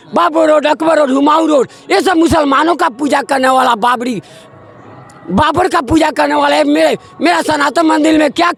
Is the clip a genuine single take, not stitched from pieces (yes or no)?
yes